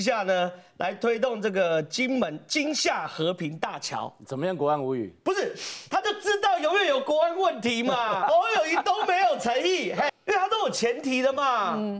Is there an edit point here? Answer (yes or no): yes